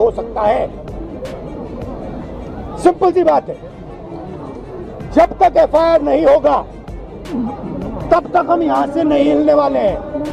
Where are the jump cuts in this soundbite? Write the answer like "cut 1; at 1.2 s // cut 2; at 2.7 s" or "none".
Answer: none